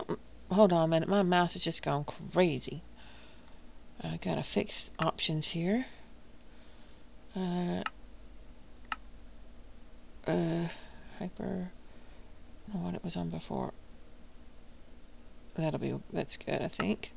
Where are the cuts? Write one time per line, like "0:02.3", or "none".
0:12.7